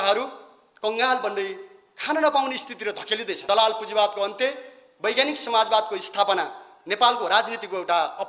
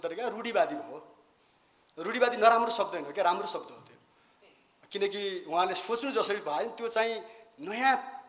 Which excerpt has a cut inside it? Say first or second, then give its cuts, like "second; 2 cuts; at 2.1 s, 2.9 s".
first; 1 cut; at 3.4 s